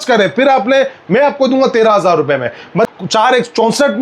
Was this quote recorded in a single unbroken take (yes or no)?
no